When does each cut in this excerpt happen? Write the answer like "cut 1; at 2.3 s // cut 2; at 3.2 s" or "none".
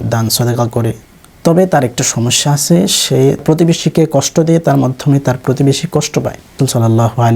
cut 1; at 1.1 s // cut 2; at 3.4 s // cut 3; at 6.5 s

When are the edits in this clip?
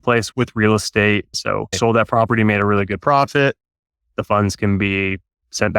cut 1; at 1.3 s

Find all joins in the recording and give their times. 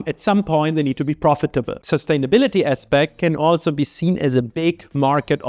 cut 1; at 1.8 s

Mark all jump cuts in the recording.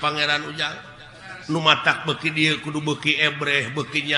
none

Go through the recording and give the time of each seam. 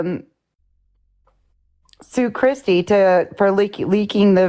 none

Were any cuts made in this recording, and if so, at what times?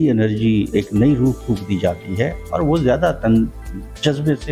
none

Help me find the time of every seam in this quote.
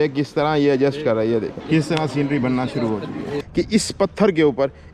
cut 1; at 1.6 s // cut 2; at 3.4 s

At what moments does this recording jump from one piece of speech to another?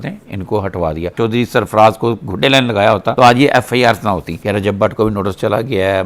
cut 1; at 1.1 s // cut 2; at 4.3 s

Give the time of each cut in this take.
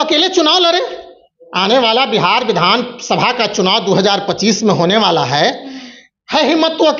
none

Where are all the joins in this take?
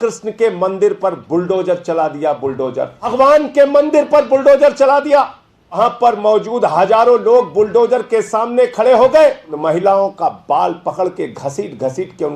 cut 1; at 3.1 s // cut 2; at 5.8 s // cut 3; at 9.5 s

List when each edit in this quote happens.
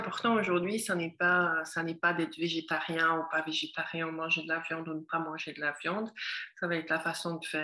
none

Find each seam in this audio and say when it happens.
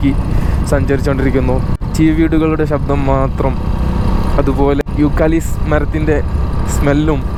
none

